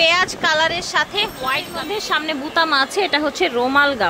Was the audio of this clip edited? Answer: yes; 1 cut; at 1.8 s

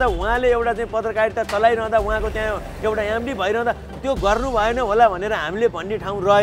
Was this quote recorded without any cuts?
yes; 0 cuts

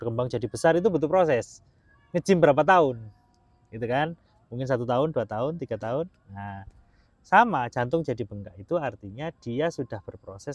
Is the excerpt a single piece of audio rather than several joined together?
yes; 0 cuts

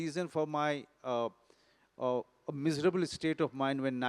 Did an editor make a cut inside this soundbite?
no; 0 cuts

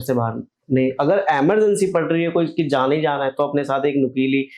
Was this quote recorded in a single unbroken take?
yes; 0 cuts

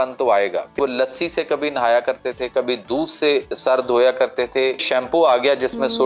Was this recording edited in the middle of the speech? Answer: yes; 3 cuts; at 0.7 s, 3.5 s, 4.8 s

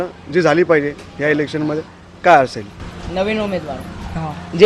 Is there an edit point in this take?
no; 0 cuts

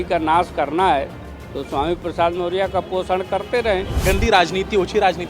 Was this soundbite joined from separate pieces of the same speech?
yes; 1 cut; at 3.9 s

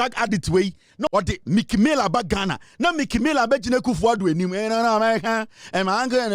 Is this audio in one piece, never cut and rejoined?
no; 1 cut; at 1.1 s

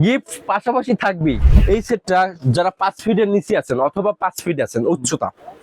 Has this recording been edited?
yes; 1 cut; at 1.4 s

